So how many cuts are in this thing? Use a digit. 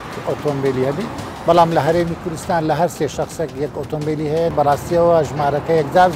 1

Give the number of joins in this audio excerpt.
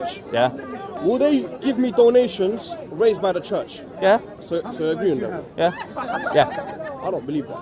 2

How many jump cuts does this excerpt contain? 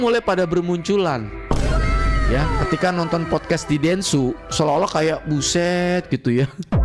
0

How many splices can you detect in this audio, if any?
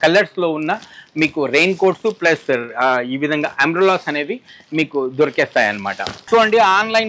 1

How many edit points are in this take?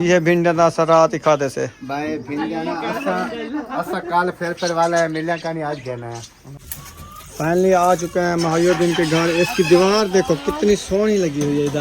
1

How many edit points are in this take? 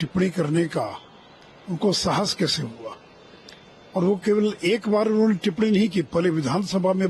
0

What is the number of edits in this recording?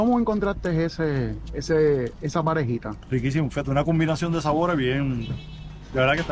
0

